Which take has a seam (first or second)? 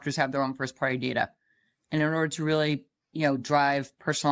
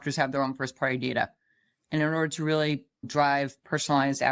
second